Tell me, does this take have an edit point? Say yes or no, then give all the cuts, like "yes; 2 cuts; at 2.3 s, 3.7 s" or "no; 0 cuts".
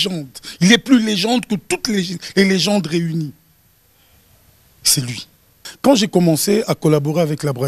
yes; 1 cut; at 5.6 s